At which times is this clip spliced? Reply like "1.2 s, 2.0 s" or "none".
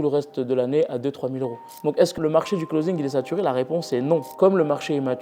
1.9 s, 4.3 s